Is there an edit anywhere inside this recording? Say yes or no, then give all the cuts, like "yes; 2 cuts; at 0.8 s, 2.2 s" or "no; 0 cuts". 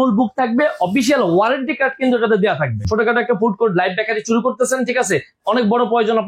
yes; 1 cut; at 2.9 s